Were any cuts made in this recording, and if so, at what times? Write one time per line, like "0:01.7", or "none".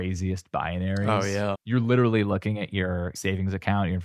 0:01.6
0:03.2